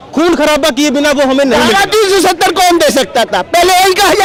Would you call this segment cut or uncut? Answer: uncut